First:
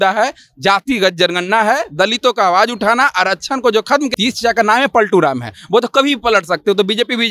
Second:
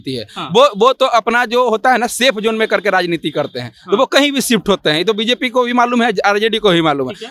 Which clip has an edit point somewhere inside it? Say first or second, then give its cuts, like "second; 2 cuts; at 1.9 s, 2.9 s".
first; 1 cut; at 4.1 s